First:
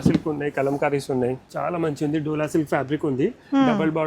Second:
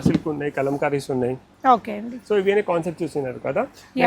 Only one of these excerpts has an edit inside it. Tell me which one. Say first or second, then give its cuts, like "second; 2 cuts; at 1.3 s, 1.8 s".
first; 1 cut; at 1.5 s